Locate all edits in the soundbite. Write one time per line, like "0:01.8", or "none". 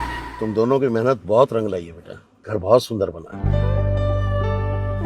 none